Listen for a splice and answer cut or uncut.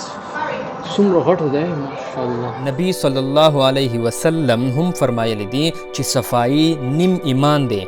cut